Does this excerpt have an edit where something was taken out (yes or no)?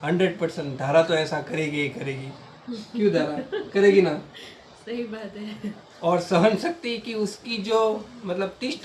no